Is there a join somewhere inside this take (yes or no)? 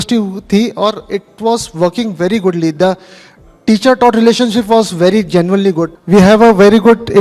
yes